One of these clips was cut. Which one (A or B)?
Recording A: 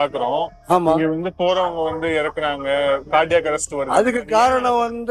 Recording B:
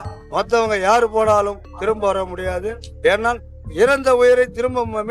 B